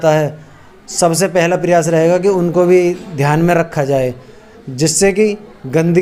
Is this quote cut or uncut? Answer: uncut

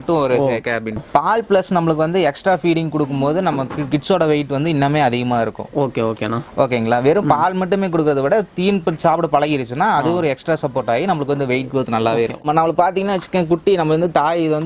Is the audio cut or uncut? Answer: cut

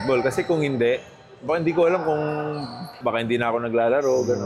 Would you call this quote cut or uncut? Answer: cut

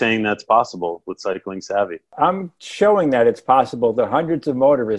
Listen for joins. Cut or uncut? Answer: cut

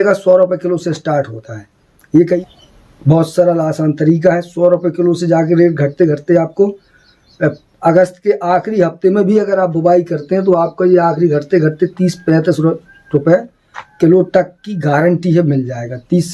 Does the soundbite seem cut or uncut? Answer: cut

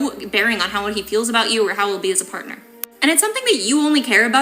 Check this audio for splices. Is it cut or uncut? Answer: cut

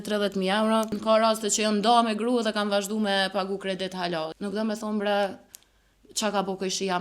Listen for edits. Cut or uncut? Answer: cut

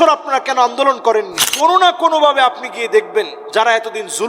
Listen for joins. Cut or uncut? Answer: cut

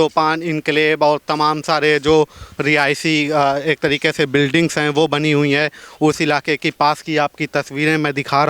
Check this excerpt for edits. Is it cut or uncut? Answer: uncut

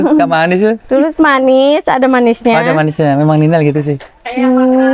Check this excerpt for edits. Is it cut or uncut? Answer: uncut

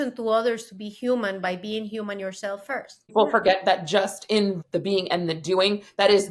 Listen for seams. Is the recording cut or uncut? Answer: cut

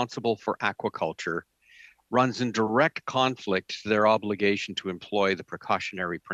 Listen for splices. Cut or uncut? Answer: uncut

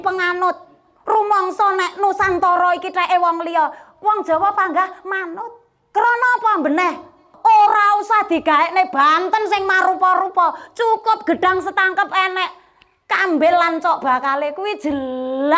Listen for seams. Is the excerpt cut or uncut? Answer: cut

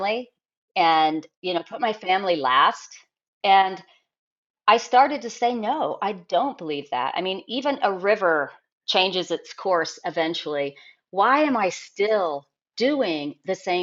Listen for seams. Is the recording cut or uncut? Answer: uncut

